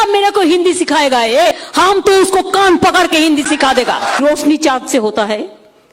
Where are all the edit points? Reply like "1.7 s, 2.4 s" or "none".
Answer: 1.5 s, 4.2 s